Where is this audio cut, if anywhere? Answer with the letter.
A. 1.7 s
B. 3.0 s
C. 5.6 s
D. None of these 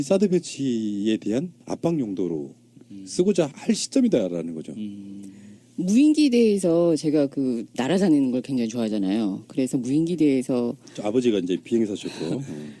C